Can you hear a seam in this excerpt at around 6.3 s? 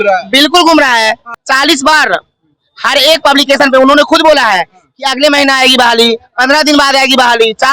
no; 1 cut; at 1.3 s

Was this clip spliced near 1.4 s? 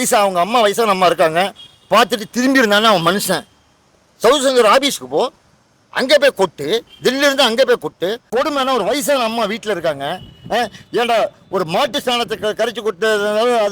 no; 1 cut; at 8.3 s

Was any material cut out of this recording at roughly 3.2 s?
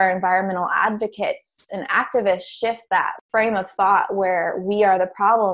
yes; 1 cut; at 3.2 s

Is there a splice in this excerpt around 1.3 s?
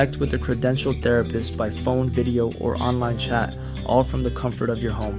no; 0 cuts

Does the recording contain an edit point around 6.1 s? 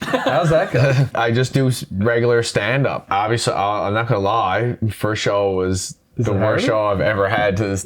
no; 3 cuts; at 1.1 s, 3.0 s, 4.9 s

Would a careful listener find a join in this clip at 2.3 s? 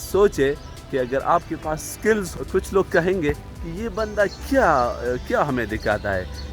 yes; 1 cut; at 2.3 s

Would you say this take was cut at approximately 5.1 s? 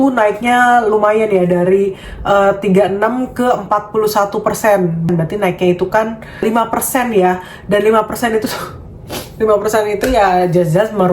yes; 2 cuts; at 5.1 s, 6.4 s

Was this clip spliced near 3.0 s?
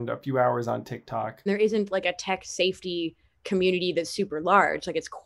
no; 1 cut; at 1.5 s

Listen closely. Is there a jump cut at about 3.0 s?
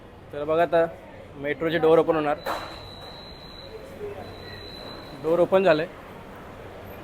no; 0 cuts

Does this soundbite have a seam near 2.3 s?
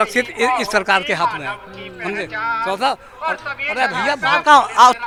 no; 0 cuts

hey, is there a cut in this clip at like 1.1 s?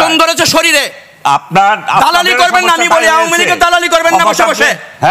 no; 0 cuts

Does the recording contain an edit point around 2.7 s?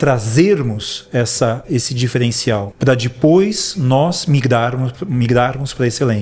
yes; 1 cut; at 2.7 s

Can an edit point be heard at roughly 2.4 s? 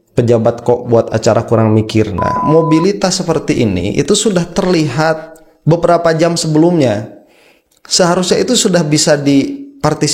yes; 1 cut; at 2.4 s

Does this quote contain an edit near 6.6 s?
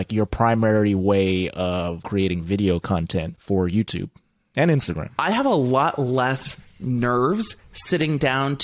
no; 3 cuts; at 2.0 s, 3.3 s, 5.1 s

